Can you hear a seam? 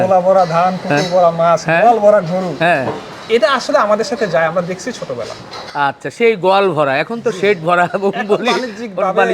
no; 0 cuts

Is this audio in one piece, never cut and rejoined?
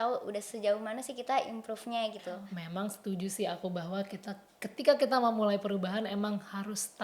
no; 1 cut; at 2.4 s

